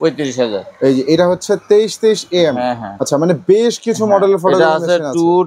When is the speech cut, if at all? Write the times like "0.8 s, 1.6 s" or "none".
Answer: 2.9 s